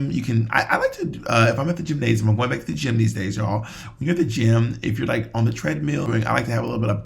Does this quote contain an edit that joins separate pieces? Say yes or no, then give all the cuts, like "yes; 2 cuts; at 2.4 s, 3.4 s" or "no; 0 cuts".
yes; 1 cut; at 6.1 s